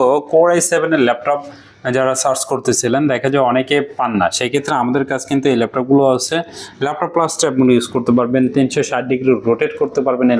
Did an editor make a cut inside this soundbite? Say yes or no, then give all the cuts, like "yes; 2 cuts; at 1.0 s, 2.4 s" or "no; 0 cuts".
no; 0 cuts